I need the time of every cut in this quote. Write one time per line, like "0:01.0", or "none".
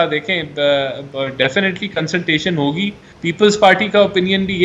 0:03.1

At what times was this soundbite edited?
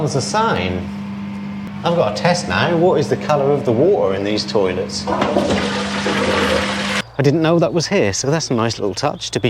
0:01.7
0:07.0

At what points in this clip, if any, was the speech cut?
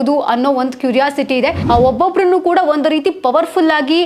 0:01.6

